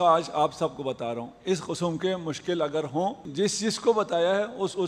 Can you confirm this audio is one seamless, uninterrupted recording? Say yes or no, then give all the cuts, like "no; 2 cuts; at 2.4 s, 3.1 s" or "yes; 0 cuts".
no; 1 cut; at 3.5 s